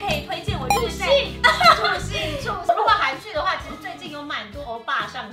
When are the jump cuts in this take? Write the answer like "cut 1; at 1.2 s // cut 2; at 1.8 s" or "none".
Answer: cut 1; at 2.7 s